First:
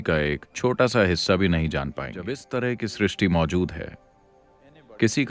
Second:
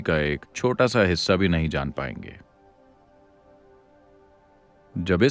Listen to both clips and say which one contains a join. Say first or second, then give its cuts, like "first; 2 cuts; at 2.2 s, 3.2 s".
first; 1 cut; at 2.4 s